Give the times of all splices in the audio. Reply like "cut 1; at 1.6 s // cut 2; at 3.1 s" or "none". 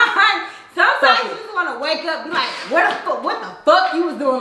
none